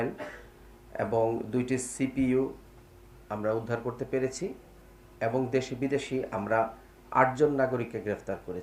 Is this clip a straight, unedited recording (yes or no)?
yes